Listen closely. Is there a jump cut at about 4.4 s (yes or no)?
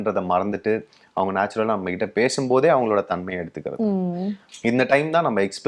yes